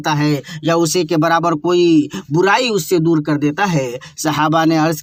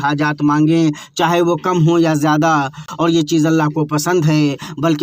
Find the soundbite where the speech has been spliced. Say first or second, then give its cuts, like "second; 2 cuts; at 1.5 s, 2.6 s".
second; 1 cut; at 2.9 s